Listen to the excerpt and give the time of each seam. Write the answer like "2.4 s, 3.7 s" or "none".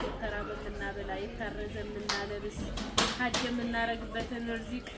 none